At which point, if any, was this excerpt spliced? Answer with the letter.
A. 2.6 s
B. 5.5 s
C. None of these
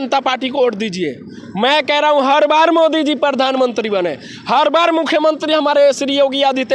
C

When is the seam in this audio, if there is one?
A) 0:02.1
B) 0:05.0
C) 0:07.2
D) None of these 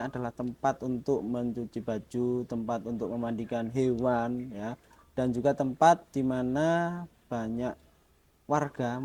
D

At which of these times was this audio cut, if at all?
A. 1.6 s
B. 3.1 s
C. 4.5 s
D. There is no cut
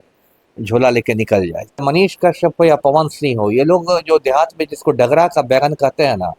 A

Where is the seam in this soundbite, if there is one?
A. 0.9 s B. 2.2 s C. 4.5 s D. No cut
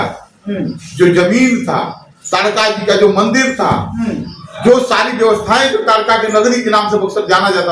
D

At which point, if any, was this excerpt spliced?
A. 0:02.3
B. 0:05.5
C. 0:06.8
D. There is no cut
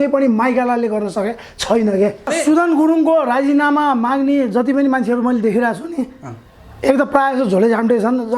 A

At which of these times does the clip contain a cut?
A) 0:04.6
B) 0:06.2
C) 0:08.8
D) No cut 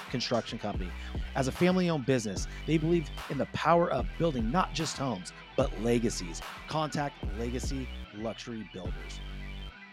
C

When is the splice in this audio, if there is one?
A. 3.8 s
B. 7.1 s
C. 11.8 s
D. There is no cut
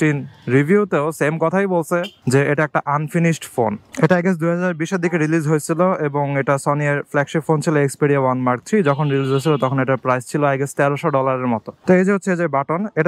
A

